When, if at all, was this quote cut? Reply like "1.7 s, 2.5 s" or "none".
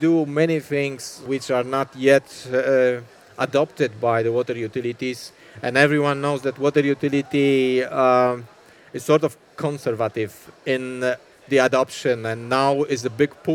1.3 s